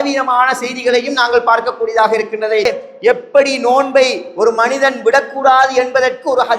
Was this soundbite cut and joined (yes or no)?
yes